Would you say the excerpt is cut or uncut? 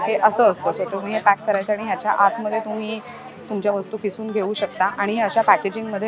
uncut